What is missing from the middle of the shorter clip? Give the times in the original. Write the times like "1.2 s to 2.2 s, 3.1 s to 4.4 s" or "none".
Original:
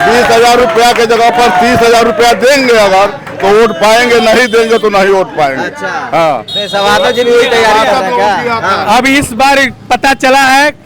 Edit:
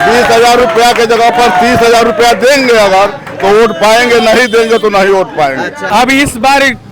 5.9 s to 8.8 s